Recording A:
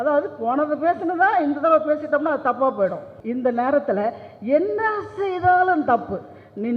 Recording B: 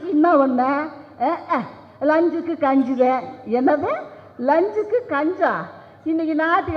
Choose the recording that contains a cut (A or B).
A